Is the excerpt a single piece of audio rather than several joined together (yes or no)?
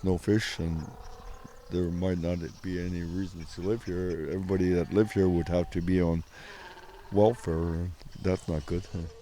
no